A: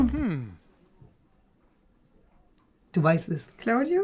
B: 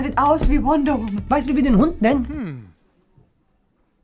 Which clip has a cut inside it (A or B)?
B